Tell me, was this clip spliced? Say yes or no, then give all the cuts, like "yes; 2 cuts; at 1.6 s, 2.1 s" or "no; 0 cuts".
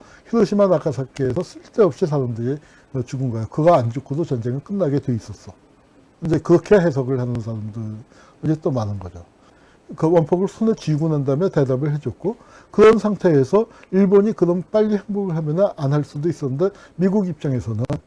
yes; 1 cut; at 9.6 s